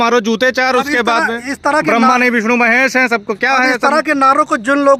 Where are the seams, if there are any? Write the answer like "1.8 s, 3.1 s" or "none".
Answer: none